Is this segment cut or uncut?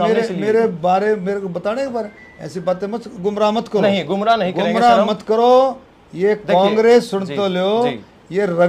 uncut